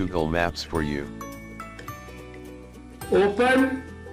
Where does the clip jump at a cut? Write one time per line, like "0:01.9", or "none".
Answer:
0:01.0
0:03.1